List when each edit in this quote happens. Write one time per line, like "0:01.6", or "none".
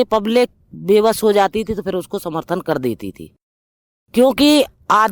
none

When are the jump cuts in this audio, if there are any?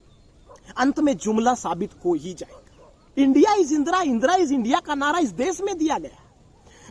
0:03.2

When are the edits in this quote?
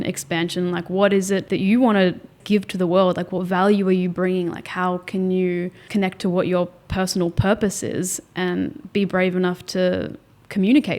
0:01.5
0:02.4
0:05.9

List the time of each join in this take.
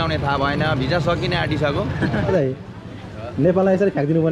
0:02.3

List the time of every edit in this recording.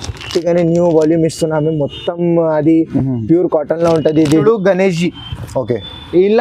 0:04.4

